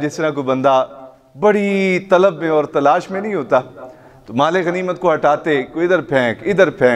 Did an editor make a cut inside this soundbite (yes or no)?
no